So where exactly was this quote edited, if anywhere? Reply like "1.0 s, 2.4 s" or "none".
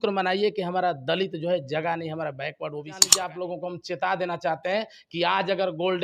3.1 s